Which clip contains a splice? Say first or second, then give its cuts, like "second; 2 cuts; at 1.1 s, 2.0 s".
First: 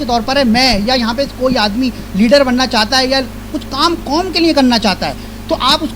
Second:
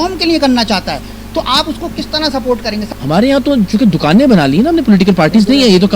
second; 1 cut; at 2.9 s